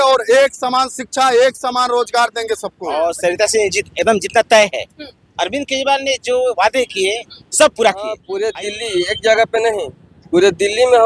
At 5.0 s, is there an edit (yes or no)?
no